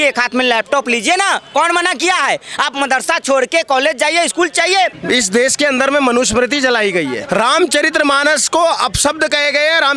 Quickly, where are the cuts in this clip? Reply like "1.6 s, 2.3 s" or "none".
5.0 s, 7.2 s